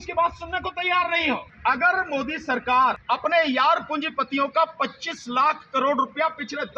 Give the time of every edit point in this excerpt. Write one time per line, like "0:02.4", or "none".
0:01.5
0:03.0